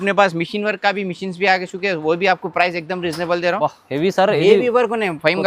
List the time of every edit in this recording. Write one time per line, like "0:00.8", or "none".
0:03.6